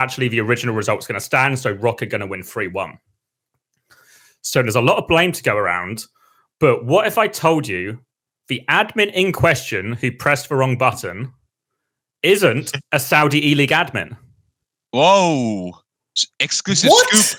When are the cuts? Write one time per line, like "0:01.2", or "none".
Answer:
none